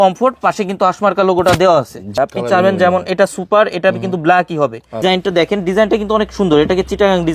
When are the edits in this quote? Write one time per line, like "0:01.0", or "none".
0:02.1
0:05.0